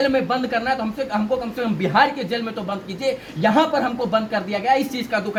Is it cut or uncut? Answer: uncut